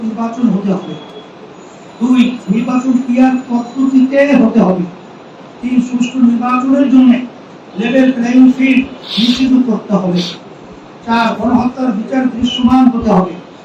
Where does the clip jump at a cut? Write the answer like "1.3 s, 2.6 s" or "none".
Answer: none